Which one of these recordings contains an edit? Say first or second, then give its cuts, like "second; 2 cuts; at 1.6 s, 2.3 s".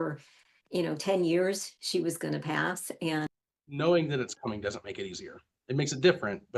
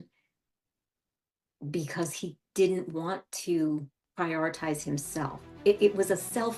first; 1 cut; at 3.3 s